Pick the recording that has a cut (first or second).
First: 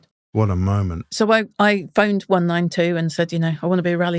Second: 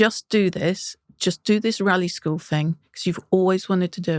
first